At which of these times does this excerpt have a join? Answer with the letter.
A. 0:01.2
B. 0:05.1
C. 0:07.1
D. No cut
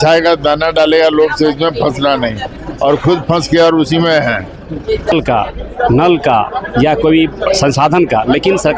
B